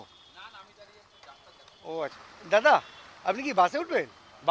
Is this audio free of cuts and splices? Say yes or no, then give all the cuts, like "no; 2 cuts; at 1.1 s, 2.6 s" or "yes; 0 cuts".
no; 1 cut; at 1.9 s